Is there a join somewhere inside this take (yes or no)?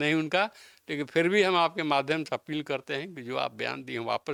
no